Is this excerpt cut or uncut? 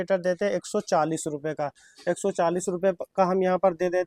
uncut